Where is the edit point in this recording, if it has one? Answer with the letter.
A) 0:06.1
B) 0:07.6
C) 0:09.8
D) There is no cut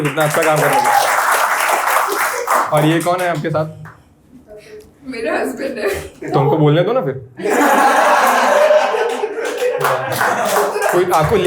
D